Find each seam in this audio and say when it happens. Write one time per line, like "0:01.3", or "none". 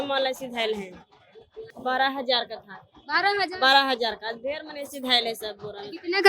0:01.6